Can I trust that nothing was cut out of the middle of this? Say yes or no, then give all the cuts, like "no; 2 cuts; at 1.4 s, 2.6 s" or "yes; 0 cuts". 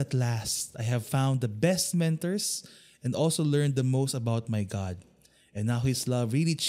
yes; 0 cuts